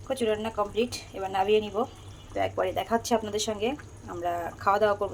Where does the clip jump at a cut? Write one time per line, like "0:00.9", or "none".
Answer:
none

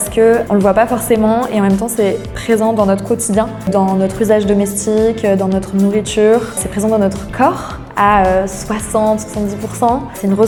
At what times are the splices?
none

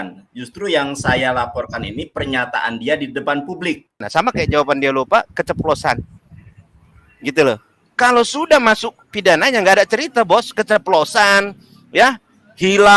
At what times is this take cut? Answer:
0:04.0

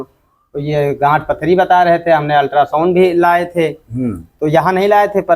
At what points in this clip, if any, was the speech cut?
none

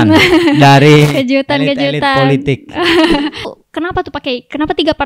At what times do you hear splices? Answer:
0:03.5

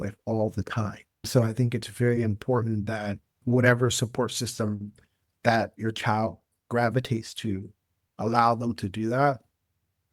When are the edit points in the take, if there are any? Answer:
0:01.3

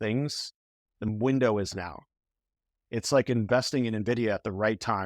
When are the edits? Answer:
0:01.1

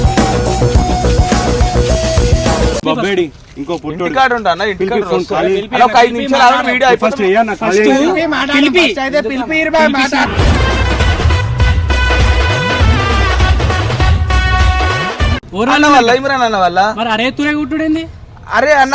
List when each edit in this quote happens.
none

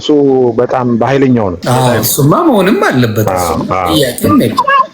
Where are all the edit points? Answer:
0:01.6

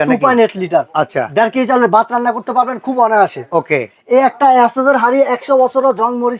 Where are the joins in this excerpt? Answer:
none

